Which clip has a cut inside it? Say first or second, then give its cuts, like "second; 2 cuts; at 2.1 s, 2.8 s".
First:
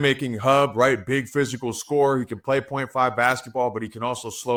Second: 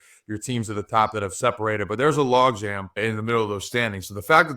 second; 1 cut; at 2.9 s